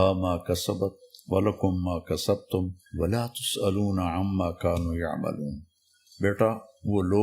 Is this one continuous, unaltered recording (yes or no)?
no